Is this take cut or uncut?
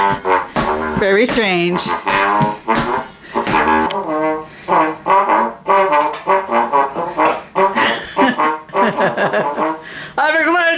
cut